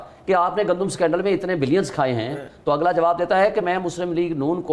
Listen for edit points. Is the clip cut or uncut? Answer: uncut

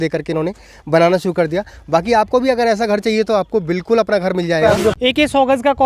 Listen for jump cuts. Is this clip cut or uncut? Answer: cut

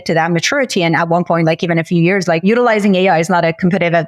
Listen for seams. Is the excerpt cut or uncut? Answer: cut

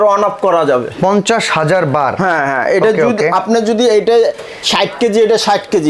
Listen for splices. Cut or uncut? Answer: uncut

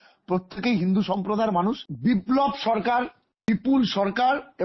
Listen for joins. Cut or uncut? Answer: cut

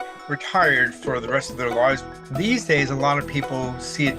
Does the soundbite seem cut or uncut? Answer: cut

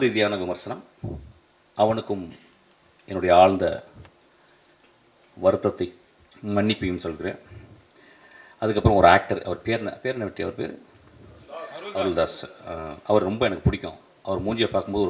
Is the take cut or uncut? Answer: uncut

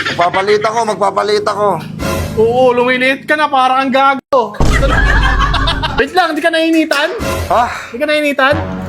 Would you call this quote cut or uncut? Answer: cut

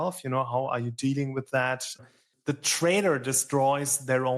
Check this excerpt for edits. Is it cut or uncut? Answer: cut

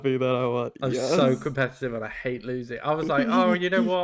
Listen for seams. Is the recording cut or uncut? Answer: uncut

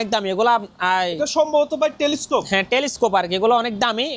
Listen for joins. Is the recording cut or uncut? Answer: uncut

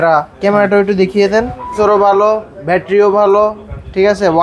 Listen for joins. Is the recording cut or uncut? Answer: cut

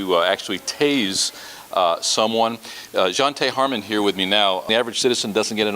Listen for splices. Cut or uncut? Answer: cut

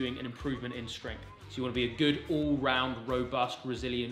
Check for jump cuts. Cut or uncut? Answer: uncut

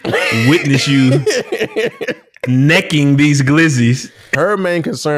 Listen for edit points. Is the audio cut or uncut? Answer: cut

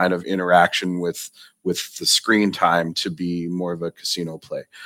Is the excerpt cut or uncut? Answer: uncut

